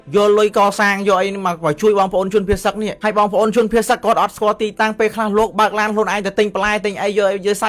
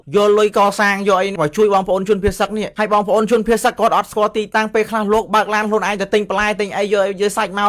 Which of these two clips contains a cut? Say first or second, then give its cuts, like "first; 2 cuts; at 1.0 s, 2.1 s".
second; 1 cut; at 1.3 s